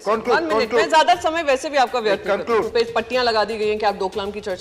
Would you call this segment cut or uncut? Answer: cut